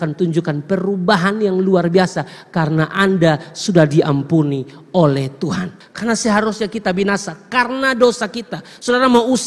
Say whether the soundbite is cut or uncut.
cut